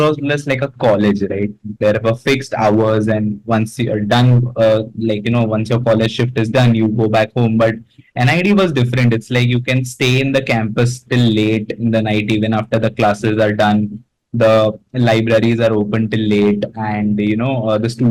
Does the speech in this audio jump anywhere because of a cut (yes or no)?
no